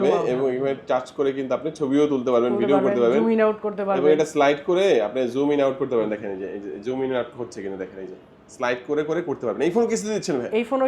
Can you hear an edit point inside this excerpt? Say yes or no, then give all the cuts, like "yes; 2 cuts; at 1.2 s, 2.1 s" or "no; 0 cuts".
no; 0 cuts